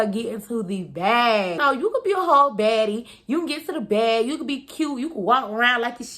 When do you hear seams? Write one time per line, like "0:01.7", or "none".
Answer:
0:01.6